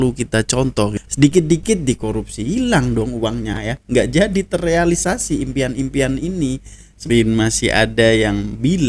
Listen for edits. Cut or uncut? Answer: cut